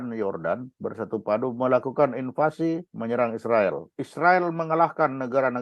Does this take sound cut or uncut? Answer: cut